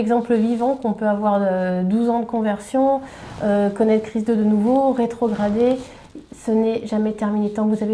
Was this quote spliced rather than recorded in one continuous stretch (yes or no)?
no